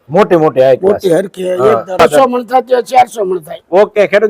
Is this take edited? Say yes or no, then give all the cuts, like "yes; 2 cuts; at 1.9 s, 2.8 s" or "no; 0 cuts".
yes; 1 cut; at 2.0 s